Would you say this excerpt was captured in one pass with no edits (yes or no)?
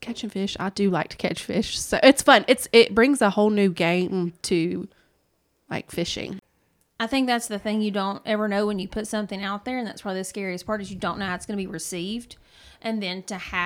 no